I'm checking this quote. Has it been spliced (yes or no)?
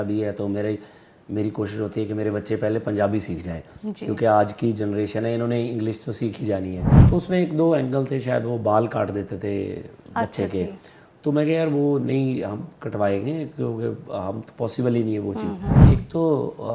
yes